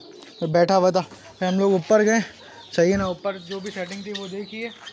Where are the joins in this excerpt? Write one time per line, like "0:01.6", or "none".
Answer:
none

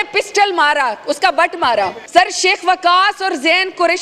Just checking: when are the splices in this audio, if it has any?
0:02.0

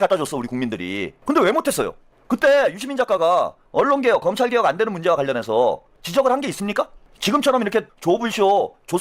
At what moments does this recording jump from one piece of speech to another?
0:01.1
0:03.6
0:05.9
0:07.0
0:07.9

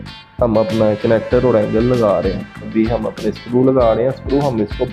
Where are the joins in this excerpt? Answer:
0:02.7

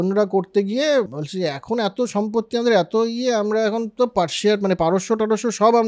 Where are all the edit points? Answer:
0:01.2

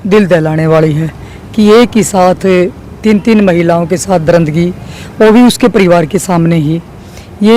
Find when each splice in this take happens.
none

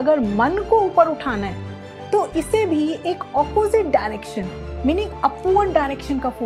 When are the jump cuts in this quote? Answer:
none

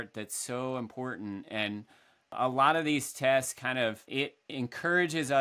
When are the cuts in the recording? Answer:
0:02.4
0:04.0

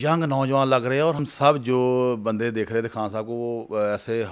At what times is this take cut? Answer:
0:01.2

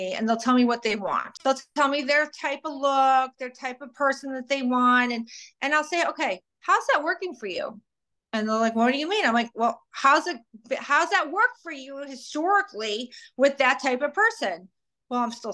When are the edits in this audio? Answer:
0:01.3

